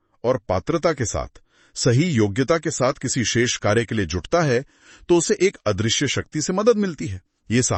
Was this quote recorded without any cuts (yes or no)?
yes